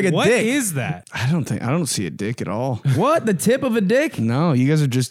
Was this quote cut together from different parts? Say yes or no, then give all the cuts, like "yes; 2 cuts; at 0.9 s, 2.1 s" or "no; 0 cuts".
yes; 1 cut; at 1.0 s